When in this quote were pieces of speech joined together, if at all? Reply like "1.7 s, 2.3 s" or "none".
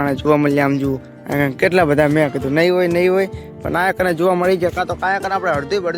1.1 s